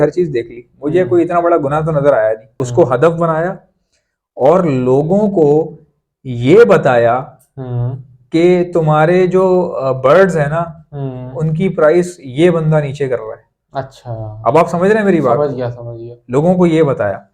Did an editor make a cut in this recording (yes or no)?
yes